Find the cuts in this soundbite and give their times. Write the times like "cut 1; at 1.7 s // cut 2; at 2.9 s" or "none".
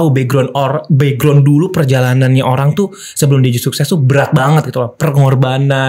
none

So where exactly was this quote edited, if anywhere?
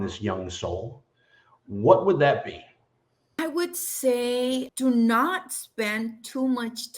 cut 1; at 3.4 s // cut 2; at 4.7 s

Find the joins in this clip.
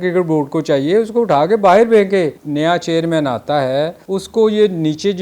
cut 1; at 2.4 s // cut 2; at 4.0 s

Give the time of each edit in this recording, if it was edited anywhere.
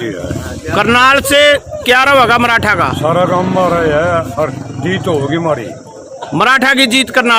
none

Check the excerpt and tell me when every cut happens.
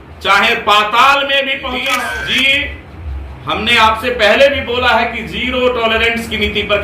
cut 1; at 1.9 s

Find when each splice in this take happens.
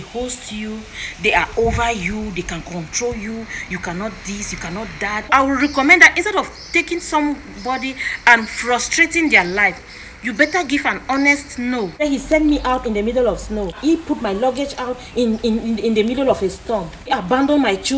cut 1; at 5.2 s // cut 2; at 12.0 s // cut 3; at 13.8 s // cut 4; at 17.1 s

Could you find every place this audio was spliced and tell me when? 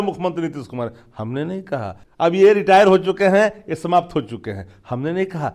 cut 1; at 2.0 s

